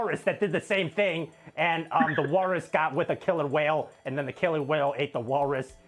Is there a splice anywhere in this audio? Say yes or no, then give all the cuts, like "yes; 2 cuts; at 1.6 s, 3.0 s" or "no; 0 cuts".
no; 0 cuts